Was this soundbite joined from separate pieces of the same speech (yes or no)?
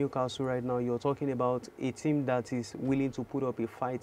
no